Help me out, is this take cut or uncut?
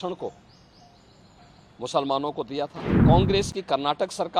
cut